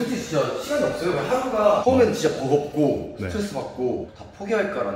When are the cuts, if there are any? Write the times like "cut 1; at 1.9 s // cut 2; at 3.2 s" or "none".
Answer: none